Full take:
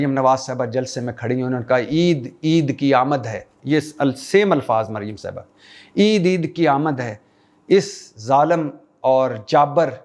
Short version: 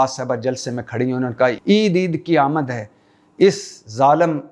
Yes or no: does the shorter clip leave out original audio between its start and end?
yes